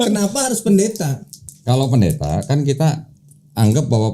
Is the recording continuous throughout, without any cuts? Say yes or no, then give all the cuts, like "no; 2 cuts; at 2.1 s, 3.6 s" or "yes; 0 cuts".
no; 1 cut; at 1.5 s